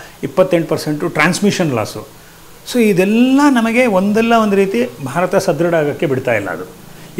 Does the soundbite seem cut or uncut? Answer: uncut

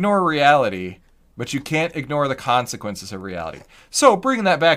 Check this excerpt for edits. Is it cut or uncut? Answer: uncut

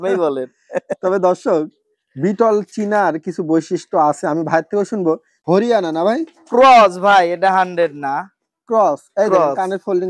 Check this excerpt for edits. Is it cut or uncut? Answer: cut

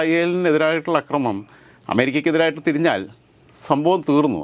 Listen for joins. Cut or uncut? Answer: uncut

